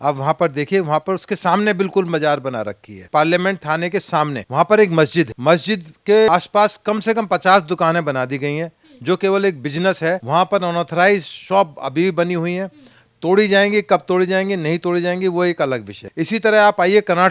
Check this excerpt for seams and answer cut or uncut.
cut